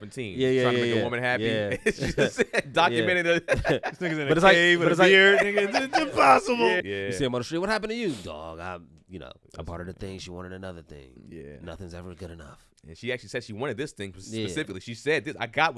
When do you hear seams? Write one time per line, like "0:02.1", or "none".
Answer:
none